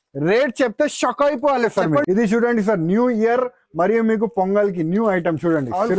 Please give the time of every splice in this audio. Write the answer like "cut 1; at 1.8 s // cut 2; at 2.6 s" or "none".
cut 1; at 2.0 s